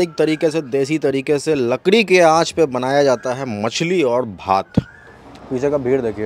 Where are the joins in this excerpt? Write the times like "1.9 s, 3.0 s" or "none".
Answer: 4.9 s